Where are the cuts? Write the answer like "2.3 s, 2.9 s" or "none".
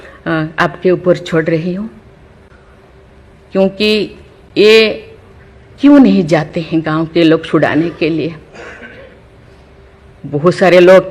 none

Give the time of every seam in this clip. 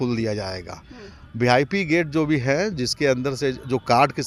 none

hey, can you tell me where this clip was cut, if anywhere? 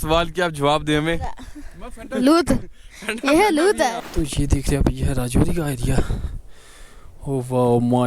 4.0 s

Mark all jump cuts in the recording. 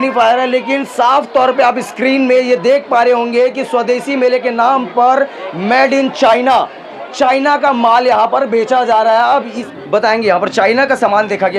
9.6 s

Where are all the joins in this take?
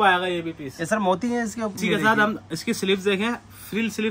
1.8 s

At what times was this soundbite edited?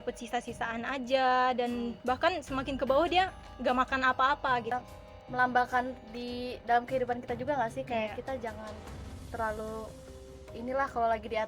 4.7 s

